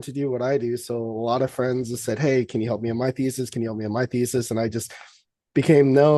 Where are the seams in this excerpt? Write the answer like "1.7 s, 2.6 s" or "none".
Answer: none